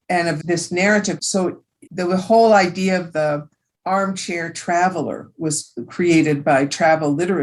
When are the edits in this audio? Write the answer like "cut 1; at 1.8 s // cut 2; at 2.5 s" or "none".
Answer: cut 1; at 1.4 s